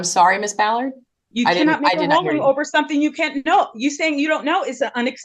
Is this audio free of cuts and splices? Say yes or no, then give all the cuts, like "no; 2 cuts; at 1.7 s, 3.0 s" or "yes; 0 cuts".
yes; 0 cuts